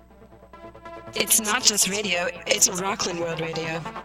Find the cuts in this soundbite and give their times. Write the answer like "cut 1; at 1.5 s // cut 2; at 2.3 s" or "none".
cut 1; at 1.1 s